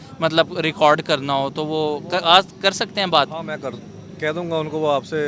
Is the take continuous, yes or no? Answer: yes